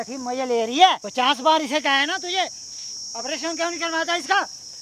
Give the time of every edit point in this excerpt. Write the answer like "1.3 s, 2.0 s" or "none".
1.0 s

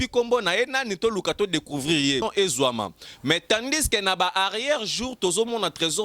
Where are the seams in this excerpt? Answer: 2.2 s

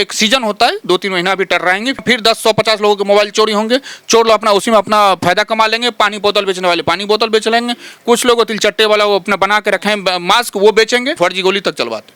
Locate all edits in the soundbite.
2.0 s, 11.1 s

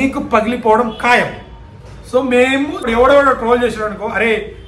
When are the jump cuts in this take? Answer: 2.8 s

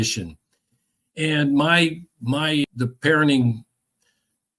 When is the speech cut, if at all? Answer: 2.7 s

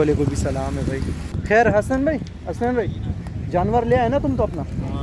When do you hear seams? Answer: none

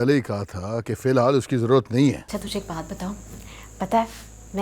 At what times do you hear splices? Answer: 2.2 s

